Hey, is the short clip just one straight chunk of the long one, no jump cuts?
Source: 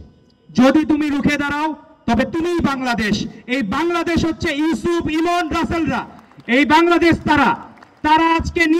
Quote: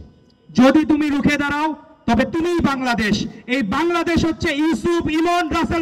yes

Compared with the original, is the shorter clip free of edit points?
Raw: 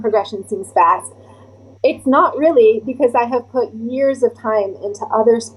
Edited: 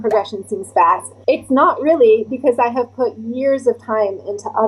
no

